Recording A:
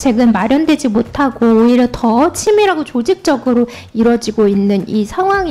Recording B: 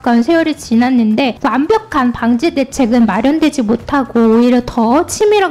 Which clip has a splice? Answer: B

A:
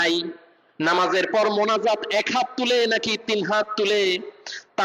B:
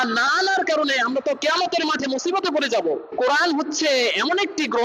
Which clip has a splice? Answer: B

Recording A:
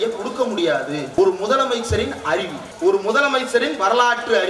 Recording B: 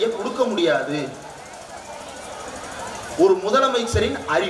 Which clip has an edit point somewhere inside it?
A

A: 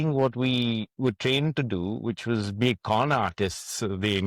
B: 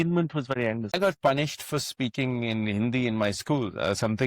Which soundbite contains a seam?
B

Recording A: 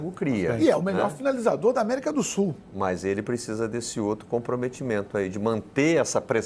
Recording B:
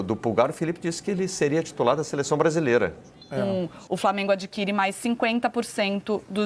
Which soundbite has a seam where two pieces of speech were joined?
B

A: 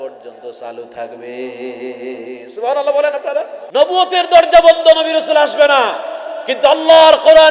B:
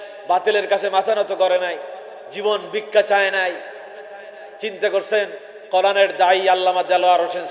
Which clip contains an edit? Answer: A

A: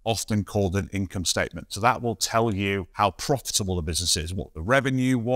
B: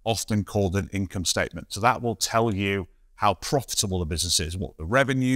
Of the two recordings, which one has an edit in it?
A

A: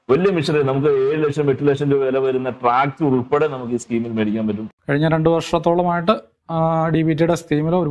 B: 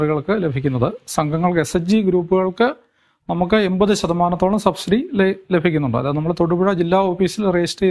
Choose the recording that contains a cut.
A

